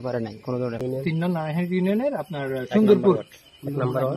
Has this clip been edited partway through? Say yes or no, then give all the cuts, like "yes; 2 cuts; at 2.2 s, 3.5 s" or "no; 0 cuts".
yes; 1 cut; at 1.2 s